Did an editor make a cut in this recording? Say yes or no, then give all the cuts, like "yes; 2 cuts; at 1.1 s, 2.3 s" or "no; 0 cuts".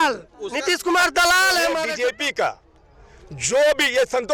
yes; 1 cut; at 1.8 s